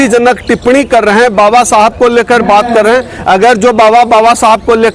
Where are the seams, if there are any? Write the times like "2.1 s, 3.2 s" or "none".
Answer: none